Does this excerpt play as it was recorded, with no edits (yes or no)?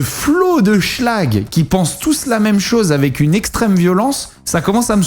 yes